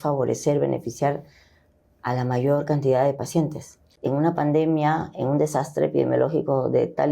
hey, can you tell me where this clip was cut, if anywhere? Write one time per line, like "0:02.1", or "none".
0:04.0